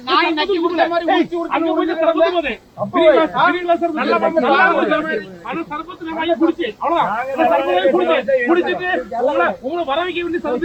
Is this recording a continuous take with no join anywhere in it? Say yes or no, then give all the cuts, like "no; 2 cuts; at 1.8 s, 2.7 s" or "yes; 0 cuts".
yes; 0 cuts